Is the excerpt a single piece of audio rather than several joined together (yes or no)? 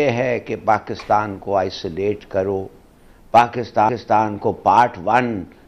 yes